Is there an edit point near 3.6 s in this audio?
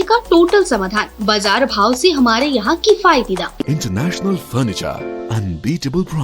yes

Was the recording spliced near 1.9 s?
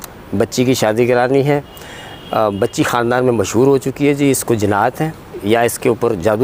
no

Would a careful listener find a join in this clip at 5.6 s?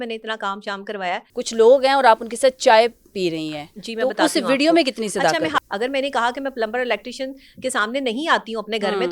yes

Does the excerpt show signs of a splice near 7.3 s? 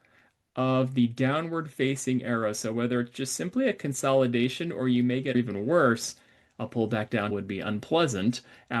yes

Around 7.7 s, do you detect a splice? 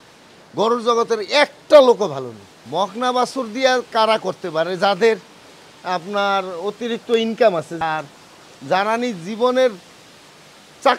yes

